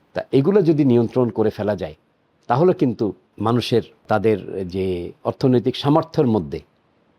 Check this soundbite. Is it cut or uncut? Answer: cut